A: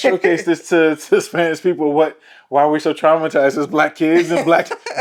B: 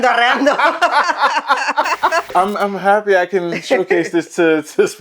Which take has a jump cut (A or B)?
B